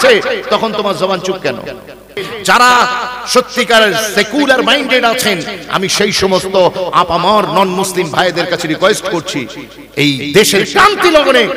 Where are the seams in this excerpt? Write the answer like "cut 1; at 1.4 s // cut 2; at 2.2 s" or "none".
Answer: cut 1; at 2.2 s